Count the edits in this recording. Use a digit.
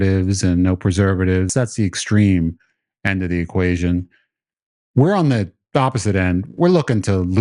1